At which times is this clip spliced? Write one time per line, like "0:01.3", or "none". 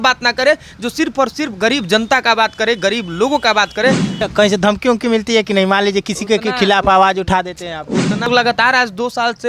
0:04.1
0:08.3